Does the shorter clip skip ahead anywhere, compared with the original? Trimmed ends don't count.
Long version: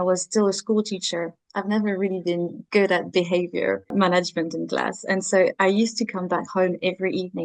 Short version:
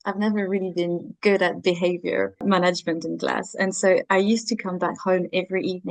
no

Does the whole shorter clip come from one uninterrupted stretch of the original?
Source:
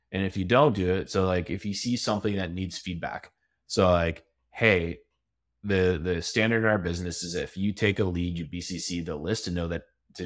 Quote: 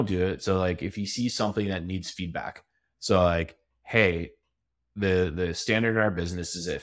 yes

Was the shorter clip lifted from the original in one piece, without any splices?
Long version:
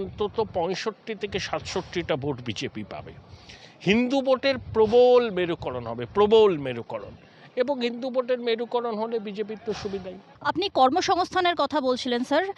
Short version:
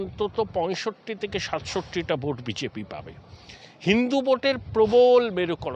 yes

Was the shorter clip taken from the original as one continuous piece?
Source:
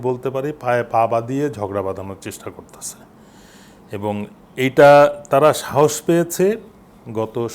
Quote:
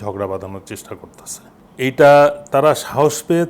no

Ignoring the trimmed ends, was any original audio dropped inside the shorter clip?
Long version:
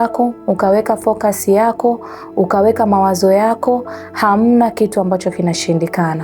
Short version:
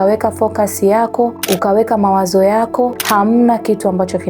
yes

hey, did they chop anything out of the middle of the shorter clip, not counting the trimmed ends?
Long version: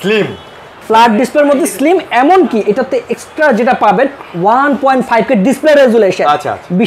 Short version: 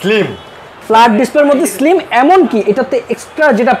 no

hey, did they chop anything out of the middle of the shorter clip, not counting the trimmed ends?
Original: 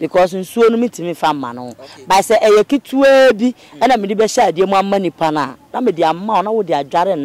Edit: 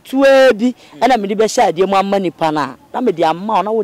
no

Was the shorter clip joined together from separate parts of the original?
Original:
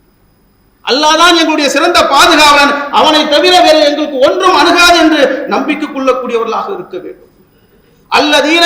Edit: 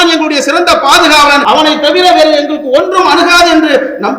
yes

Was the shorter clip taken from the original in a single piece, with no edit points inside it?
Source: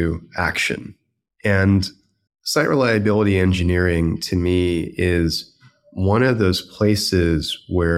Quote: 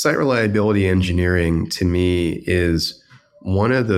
yes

